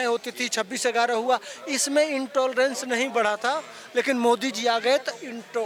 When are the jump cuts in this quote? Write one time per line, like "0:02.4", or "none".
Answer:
none